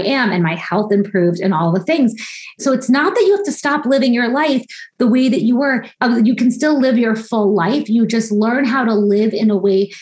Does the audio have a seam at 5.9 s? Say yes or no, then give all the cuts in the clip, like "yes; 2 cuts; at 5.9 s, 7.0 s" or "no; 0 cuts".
yes; 2 cuts; at 2.6 s, 5.9 s